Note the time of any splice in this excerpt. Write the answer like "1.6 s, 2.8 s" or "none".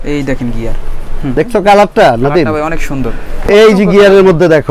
1.3 s, 3.4 s